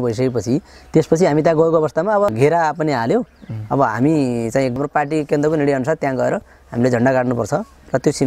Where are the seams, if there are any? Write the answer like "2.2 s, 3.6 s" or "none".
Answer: 2.3 s, 4.7 s